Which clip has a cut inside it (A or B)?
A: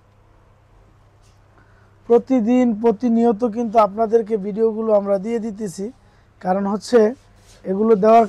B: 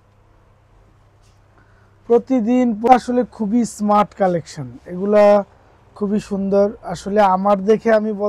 B